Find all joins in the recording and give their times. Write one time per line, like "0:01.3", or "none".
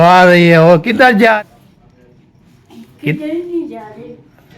0:01.3